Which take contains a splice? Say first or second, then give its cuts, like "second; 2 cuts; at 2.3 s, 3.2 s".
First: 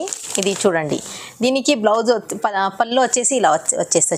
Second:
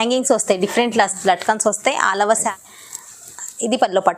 second; 1 cut; at 2.5 s